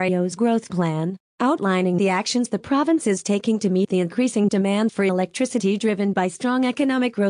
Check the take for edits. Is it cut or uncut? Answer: cut